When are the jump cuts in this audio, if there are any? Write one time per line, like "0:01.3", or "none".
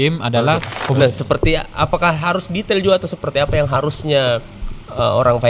0:01.0